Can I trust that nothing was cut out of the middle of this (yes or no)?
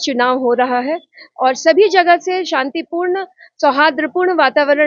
yes